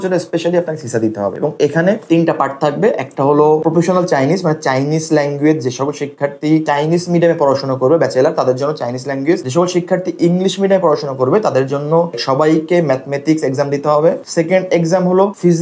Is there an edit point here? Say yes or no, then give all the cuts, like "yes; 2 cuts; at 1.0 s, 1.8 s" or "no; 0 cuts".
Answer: no; 0 cuts